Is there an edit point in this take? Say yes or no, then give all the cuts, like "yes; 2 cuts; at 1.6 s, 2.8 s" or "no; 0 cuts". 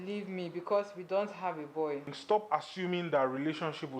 yes; 1 cut; at 2.1 s